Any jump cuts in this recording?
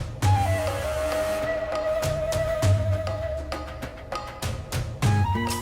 no; 0 cuts

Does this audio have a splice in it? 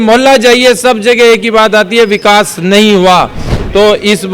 no; 0 cuts

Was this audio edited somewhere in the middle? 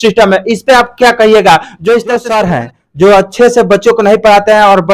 yes; 1 cut; at 2.3 s

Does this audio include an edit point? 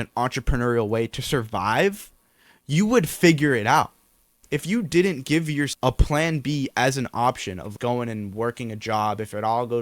yes; 3 cuts; at 4.4 s, 5.7 s, 7.7 s

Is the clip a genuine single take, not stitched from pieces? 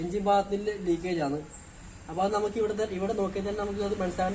yes; 0 cuts

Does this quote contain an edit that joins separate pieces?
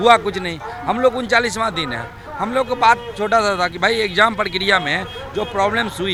no; 0 cuts

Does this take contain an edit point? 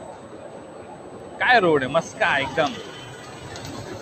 no; 0 cuts

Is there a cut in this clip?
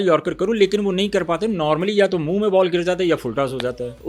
no; 0 cuts

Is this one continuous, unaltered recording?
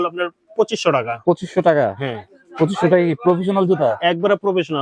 yes; 0 cuts

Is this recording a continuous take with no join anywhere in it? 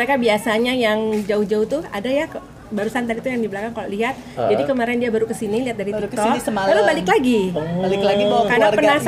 yes; 0 cuts

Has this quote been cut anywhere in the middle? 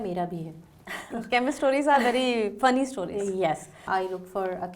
yes; 1 cut; at 3.8 s

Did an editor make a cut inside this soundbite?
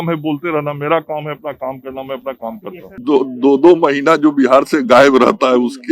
yes; 1 cut; at 3.0 s

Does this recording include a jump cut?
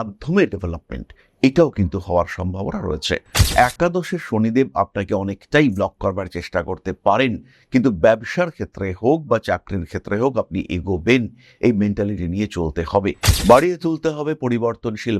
yes; 2 cuts; at 3.4 s, 13.3 s

